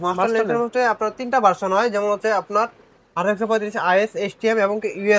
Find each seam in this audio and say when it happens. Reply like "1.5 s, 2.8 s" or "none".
none